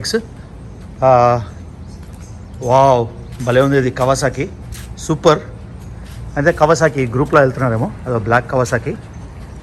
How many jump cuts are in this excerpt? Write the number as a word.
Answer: zero